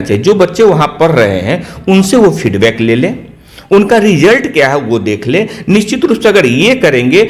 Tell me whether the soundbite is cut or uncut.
uncut